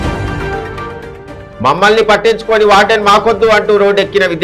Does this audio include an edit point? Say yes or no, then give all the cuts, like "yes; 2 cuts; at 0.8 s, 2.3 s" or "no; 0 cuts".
no; 0 cuts